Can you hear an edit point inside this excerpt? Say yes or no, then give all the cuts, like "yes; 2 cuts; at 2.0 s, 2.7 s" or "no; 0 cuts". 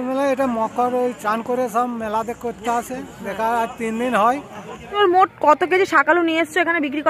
yes; 1 cut; at 4.9 s